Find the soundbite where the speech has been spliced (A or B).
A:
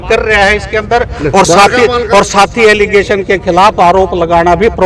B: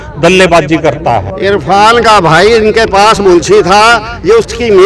B